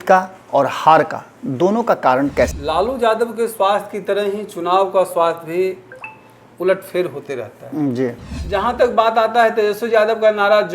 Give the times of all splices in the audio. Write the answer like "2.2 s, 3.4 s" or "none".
2.6 s, 8.3 s